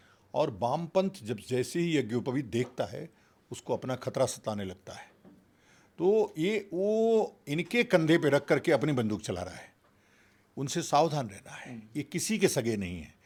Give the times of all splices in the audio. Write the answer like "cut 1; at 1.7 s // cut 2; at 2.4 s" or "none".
none